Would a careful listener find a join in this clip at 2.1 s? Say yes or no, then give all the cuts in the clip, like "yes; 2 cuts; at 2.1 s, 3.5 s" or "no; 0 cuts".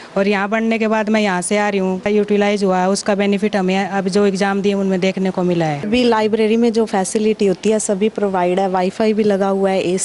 yes; 2 cuts; at 2.1 s, 5.9 s